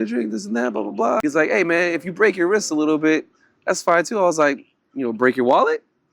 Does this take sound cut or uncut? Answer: cut